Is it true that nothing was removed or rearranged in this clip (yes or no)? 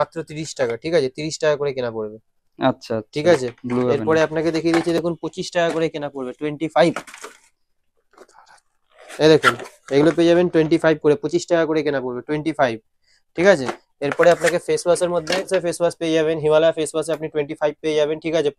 yes